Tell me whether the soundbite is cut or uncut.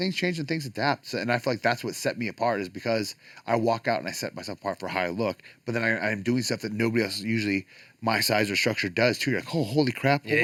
uncut